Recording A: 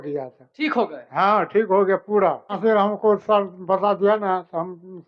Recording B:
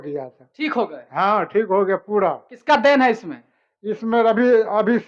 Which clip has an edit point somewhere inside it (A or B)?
A